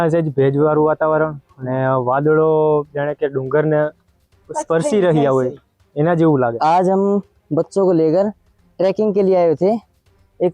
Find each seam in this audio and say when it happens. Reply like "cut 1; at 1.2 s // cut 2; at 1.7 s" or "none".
cut 1; at 6.6 s